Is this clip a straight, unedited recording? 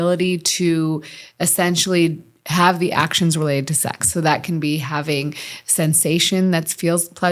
yes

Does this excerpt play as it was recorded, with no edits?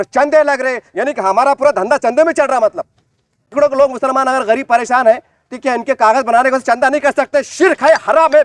no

